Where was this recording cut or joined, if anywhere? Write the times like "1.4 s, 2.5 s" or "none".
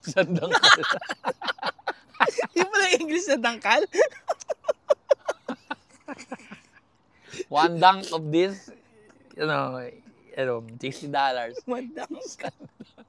none